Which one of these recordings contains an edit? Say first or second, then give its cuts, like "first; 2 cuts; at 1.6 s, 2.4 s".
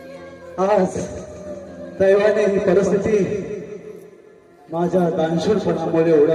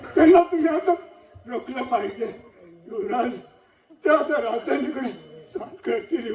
first; 1 cut; at 1.8 s